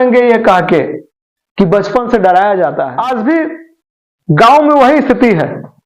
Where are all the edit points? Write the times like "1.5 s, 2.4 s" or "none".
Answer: 2.9 s